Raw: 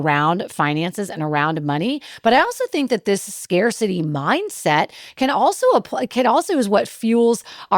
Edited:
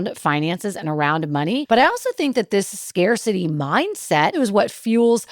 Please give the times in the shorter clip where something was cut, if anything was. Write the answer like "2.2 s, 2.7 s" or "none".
1.6 s, 4.3 s